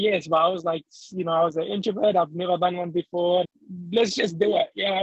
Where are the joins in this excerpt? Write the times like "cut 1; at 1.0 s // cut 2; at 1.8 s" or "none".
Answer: cut 1; at 3.5 s